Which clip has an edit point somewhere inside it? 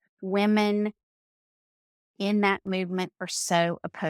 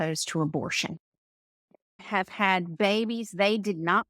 second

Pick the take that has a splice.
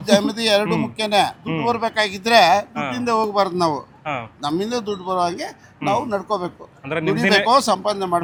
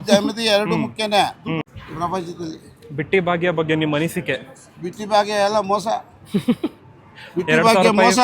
second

